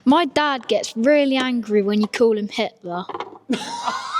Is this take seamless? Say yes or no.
yes